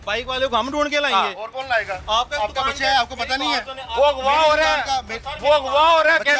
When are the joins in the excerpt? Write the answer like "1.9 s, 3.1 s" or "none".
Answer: none